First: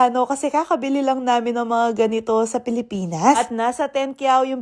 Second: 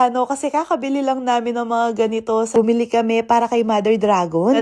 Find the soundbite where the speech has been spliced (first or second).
second